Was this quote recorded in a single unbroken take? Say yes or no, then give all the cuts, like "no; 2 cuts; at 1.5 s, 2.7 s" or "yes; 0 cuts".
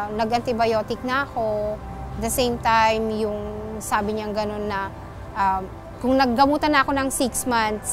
yes; 0 cuts